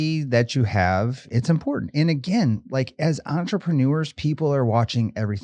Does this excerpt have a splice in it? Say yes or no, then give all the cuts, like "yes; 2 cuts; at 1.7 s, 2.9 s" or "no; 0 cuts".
yes; 1 cut; at 1.3 s